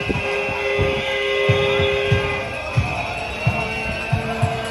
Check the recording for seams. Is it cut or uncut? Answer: uncut